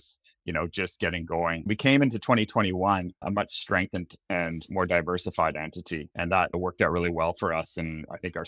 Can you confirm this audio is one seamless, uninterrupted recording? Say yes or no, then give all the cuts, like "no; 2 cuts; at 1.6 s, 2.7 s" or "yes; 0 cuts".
no; 3 cuts; at 1.7 s, 3.2 s, 6.6 s